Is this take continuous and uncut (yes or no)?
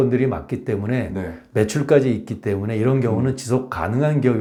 yes